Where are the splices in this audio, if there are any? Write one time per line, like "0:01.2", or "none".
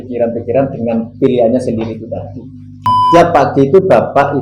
0:02.9